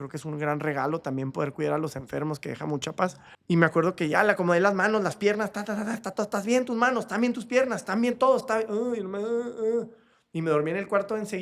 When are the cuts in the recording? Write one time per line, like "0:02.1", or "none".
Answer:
0:03.3